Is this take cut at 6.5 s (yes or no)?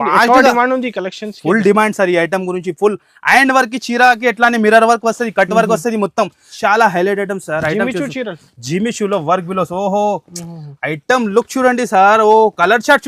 yes